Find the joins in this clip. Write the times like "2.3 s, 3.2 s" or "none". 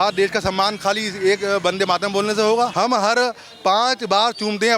2.7 s